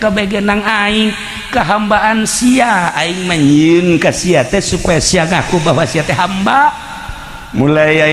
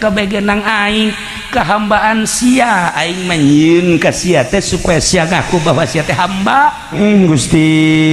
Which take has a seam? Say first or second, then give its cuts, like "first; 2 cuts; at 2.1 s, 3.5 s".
second; 1 cut; at 6.9 s